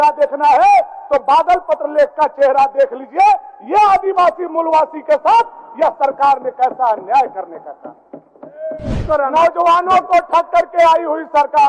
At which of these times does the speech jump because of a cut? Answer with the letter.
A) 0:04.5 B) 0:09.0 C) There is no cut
B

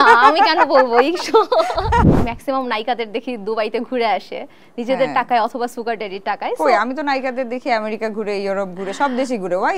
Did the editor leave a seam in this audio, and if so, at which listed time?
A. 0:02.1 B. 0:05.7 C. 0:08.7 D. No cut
A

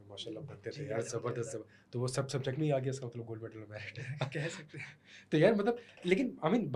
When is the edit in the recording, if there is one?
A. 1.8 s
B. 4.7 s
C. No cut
C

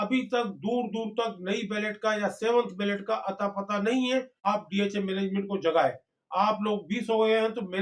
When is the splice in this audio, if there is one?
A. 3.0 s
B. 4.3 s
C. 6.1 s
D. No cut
B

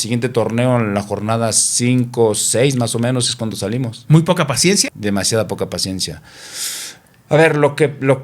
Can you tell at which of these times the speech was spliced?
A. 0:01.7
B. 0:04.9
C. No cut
B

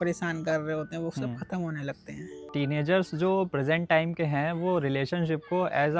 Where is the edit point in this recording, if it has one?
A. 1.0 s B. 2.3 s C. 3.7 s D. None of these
B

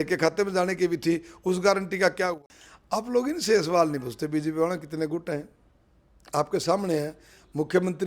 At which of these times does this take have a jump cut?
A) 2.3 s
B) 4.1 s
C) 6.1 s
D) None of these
A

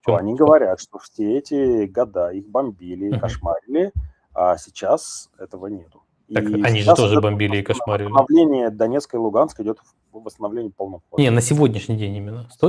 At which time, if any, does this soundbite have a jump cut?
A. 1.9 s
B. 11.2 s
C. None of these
B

